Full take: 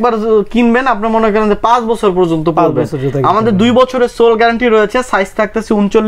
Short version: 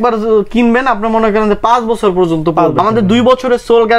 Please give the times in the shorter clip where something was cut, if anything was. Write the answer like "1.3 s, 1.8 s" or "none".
2.8 s